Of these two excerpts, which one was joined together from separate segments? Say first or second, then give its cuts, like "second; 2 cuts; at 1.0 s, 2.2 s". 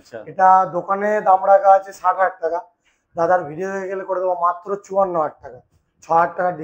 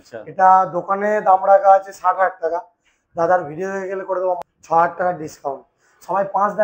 second; 1 cut; at 4.4 s